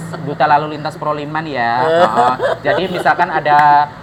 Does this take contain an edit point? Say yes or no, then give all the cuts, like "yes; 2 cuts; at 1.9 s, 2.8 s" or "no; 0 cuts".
no; 0 cuts